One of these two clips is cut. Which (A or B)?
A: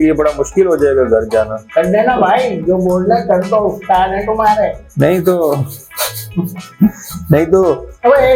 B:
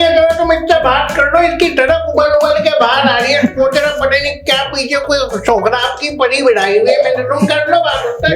A